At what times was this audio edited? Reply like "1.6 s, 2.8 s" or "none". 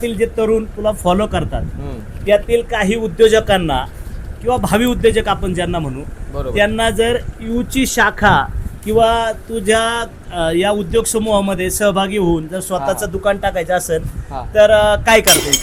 none